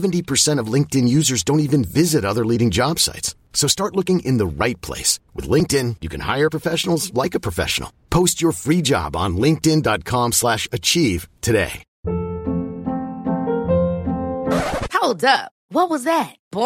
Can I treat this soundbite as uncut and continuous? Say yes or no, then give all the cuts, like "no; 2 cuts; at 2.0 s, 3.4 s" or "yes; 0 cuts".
no; 1 cut; at 11.8 s